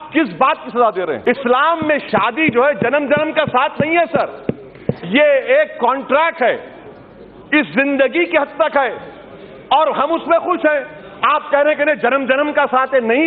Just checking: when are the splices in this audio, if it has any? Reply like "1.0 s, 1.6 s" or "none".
1.2 s